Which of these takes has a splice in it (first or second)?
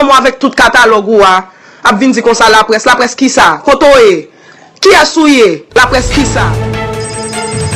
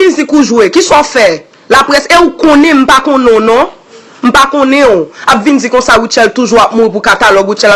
first